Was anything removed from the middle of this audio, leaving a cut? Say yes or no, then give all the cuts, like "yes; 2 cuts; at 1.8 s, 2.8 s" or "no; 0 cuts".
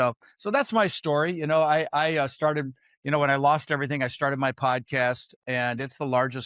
yes; 1 cut; at 5.3 s